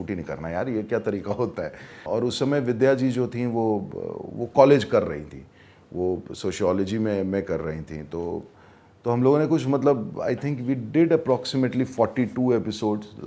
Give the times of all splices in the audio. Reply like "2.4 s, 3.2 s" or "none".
2.0 s